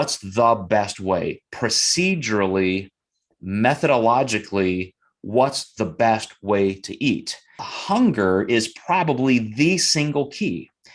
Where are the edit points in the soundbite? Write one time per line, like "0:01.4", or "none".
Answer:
0:07.7